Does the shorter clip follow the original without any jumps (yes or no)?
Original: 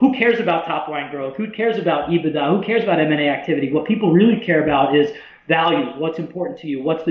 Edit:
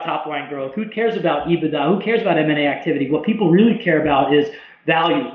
yes